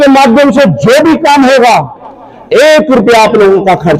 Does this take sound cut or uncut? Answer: uncut